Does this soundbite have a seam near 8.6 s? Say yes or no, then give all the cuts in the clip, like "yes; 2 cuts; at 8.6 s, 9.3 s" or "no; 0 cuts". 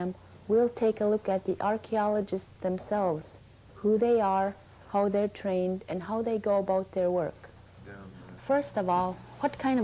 yes; 1 cut; at 8.6 s